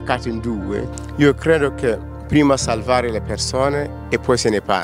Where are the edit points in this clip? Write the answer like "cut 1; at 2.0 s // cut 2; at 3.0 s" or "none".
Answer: cut 1; at 1.0 s